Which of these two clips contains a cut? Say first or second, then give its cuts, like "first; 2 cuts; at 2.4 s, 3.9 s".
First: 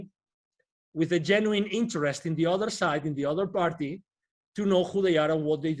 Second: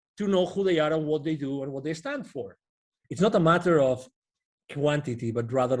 second; 1 cut; at 2.9 s